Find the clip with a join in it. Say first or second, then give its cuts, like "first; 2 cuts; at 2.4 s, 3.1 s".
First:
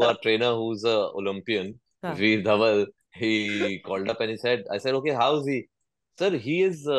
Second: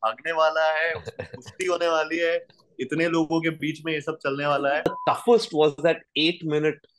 second; 1 cut; at 5.0 s